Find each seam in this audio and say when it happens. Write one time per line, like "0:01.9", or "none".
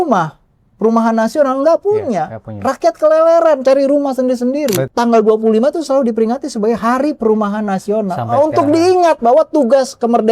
0:04.9